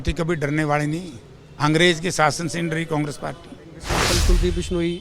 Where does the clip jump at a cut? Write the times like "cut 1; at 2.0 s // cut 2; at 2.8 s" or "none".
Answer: cut 1; at 4.0 s